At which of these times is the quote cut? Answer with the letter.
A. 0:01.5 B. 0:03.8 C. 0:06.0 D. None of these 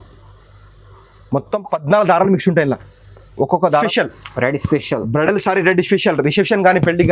B